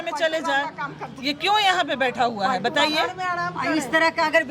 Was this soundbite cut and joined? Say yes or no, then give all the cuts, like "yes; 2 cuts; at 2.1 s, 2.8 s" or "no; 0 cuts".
no; 0 cuts